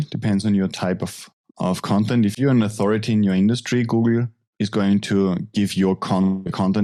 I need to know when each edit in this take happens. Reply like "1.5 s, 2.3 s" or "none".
none